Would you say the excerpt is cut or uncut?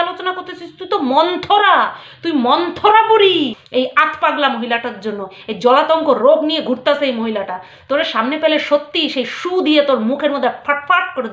cut